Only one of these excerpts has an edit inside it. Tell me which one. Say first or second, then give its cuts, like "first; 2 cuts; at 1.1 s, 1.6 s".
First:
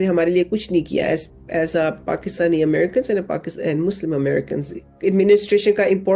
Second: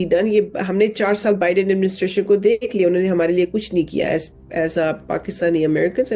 first; 1 cut; at 4.9 s